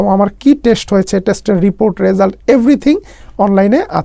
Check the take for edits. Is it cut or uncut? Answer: uncut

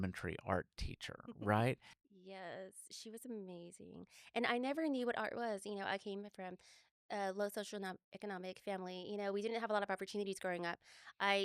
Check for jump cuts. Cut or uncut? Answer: cut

